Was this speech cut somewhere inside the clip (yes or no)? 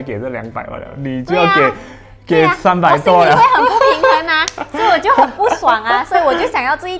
no